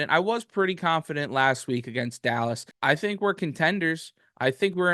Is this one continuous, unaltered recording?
no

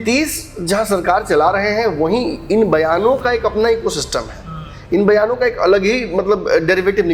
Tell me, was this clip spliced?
no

